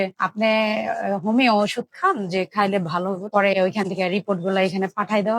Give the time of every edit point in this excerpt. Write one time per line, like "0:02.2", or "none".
0:03.3